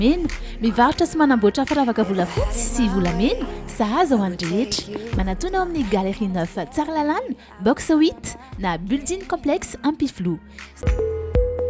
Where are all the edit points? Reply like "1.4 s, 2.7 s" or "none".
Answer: 10.8 s